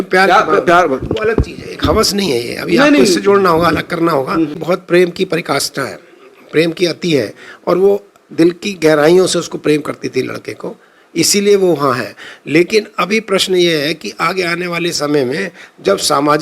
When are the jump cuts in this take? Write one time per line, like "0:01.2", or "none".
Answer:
0:04.6